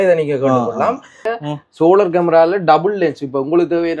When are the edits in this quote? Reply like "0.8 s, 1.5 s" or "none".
1.3 s